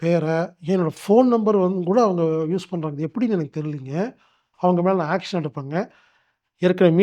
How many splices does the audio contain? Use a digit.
1